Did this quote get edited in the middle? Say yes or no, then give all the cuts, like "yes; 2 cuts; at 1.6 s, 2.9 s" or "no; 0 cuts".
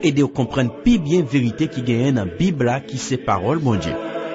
no; 0 cuts